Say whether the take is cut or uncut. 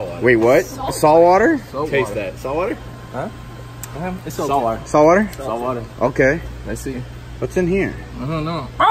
uncut